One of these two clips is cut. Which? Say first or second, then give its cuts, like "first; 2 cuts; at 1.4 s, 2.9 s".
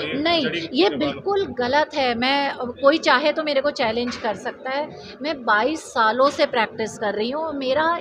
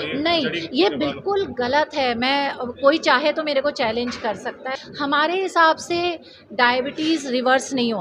second; 1 cut; at 4.7 s